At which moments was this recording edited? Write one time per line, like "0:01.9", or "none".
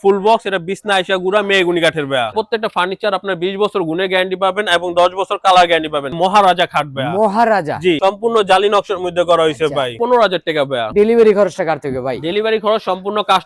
0:02.3
0:06.2
0:08.0
0:10.2

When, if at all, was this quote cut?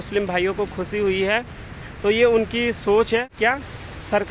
0:03.3

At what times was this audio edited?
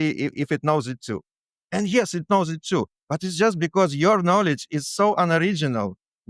0:03.0

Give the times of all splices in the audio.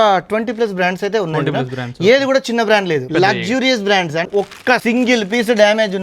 0:03.1
0:04.3

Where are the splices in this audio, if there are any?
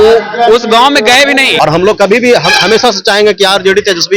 0:01.5

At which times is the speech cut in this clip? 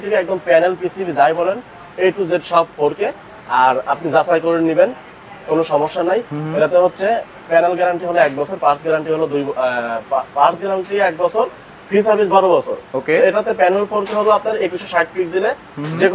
none

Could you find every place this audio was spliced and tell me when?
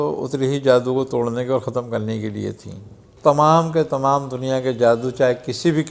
0:03.1

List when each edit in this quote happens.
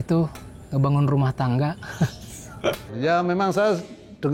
0:02.9

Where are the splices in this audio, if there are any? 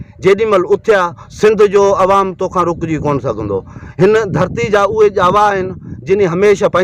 0:01.2

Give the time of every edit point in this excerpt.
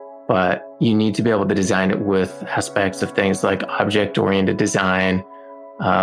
none

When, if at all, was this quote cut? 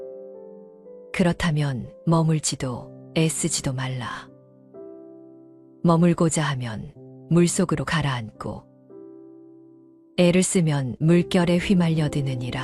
0:01.1

